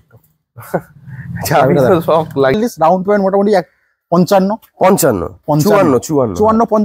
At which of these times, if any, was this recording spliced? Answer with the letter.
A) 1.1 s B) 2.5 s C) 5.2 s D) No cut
B